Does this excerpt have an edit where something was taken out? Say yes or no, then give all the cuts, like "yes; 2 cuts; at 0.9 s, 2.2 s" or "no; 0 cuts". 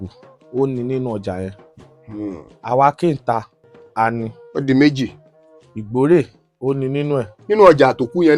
no; 0 cuts